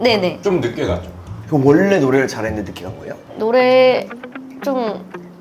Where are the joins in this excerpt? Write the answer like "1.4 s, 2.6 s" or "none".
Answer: 1.4 s